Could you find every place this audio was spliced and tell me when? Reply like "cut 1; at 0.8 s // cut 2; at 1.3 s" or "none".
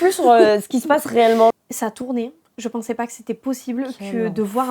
cut 1; at 1.5 s